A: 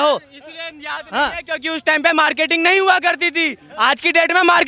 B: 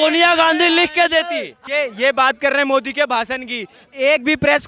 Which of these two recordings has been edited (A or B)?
B